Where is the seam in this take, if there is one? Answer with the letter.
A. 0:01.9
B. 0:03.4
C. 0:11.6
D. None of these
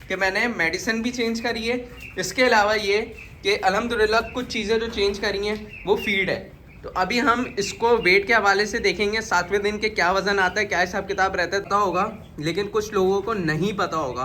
C